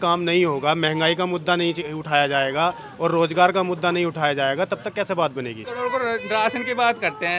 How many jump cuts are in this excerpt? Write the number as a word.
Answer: one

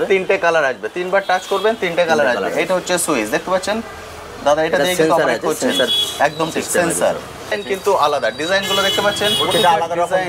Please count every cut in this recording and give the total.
one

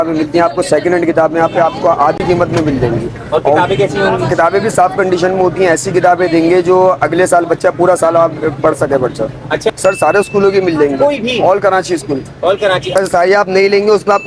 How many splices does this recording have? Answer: two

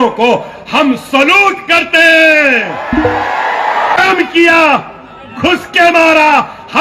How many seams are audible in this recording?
one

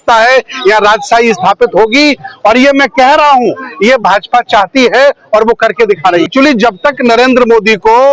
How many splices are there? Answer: one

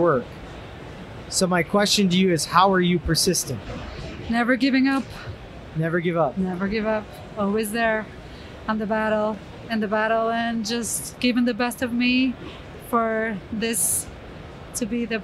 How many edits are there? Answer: zero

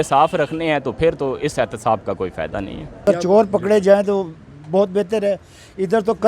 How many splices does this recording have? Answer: one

